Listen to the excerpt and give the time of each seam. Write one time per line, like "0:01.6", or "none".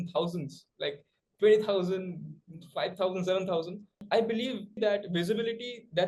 none